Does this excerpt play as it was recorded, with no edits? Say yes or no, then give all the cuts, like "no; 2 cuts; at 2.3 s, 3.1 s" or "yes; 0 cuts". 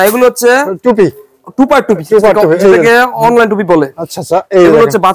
yes; 0 cuts